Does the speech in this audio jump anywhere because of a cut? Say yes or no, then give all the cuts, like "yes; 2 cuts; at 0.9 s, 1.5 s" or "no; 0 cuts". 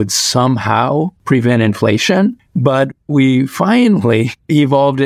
yes; 2 cuts; at 1.2 s, 2.4 s